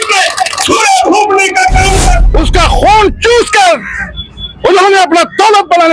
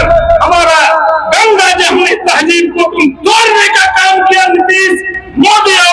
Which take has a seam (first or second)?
first